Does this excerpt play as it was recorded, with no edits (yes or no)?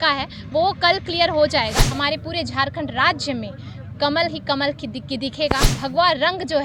no